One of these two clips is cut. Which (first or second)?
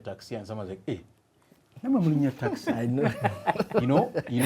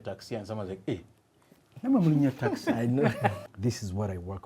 second